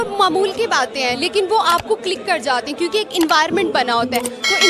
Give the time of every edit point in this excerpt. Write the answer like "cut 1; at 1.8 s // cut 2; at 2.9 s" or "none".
none